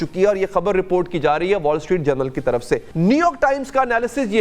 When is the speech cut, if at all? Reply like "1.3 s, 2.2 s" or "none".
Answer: 2.9 s

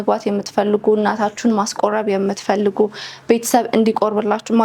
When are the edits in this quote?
none

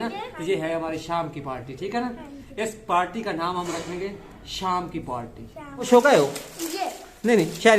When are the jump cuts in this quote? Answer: 5.9 s

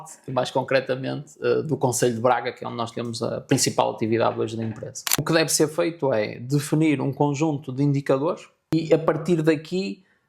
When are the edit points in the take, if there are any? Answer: 5.2 s, 8.7 s

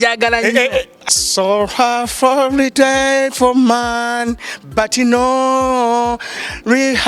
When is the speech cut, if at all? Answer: 1.0 s

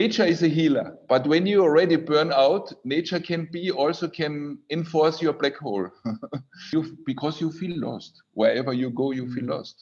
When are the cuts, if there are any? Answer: 0.9 s, 6.7 s

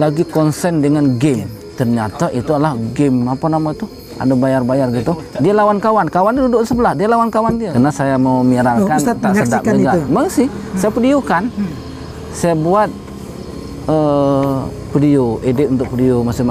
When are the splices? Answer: 7.7 s

